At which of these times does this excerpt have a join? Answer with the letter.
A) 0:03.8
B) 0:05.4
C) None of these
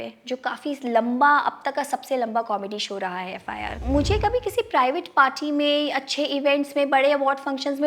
A